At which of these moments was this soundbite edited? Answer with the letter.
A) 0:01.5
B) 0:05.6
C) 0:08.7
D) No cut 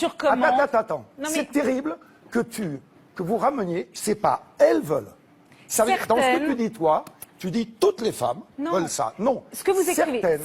B